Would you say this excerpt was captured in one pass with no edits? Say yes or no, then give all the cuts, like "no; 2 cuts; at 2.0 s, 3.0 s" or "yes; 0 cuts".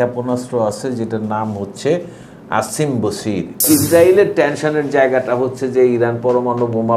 no; 1 cut; at 3.6 s